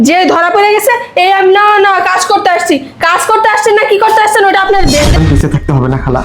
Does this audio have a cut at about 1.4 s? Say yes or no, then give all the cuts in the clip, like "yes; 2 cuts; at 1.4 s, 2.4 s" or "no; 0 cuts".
no; 1 cut; at 5.1 s